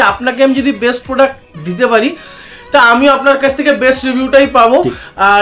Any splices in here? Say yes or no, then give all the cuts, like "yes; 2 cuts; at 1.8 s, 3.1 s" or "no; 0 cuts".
no; 0 cuts